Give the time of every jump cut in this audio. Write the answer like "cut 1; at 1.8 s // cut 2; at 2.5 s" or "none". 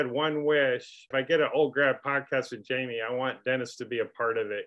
cut 1; at 1.0 s

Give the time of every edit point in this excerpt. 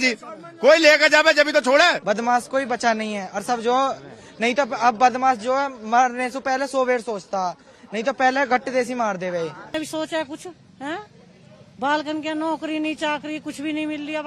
cut 1; at 2.0 s // cut 2; at 9.8 s

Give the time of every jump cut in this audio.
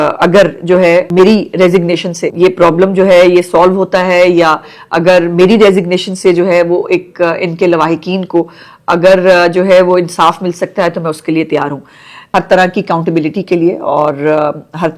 cut 1; at 1.1 s // cut 2; at 2.2 s // cut 3; at 12.2 s

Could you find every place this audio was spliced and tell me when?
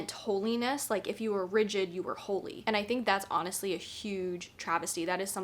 cut 1; at 2.6 s

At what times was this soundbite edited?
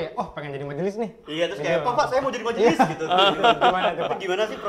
none

